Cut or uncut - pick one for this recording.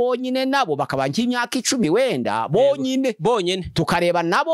uncut